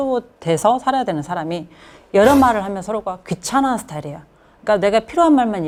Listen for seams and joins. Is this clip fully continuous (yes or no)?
yes